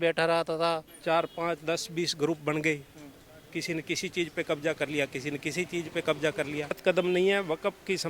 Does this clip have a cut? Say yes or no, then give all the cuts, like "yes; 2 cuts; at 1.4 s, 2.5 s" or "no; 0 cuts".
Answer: yes; 2 cuts; at 0.9 s, 6.8 s